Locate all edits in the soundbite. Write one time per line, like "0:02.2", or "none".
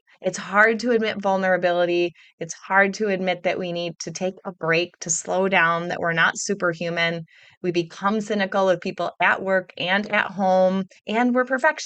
0:11.0